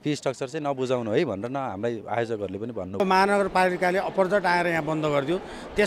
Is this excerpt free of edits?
no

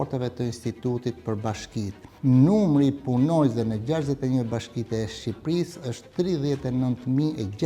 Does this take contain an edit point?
yes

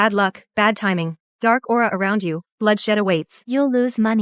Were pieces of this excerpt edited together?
no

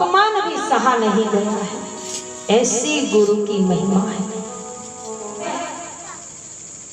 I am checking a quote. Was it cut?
yes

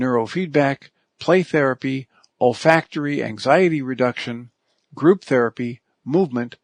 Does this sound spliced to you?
no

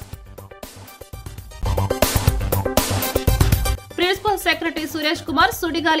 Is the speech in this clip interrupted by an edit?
yes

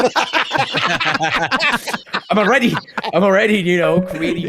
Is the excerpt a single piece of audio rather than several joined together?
yes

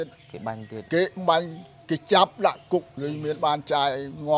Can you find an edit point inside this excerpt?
yes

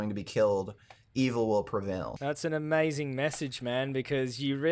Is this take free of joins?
no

